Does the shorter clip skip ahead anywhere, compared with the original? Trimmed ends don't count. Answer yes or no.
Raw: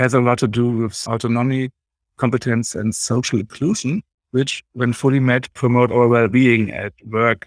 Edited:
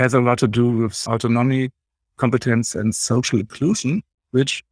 no